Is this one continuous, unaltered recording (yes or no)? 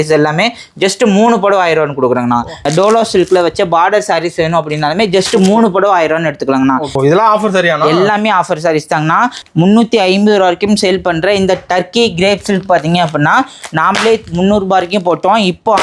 no